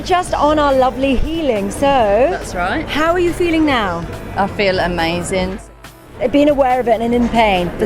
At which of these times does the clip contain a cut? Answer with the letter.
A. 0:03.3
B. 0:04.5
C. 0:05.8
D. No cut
C